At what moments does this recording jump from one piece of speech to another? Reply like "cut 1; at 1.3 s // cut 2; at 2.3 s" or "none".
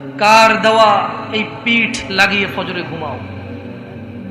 cut 1; at 3.2 s